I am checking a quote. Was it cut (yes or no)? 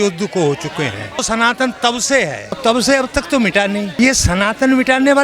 yes